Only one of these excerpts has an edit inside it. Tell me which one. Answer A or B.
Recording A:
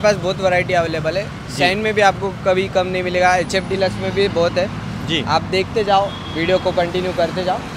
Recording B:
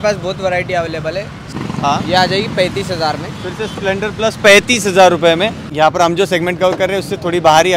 B